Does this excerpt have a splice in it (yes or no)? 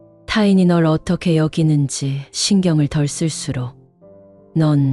no